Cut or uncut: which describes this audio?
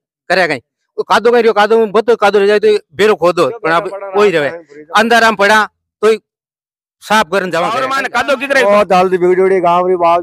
cut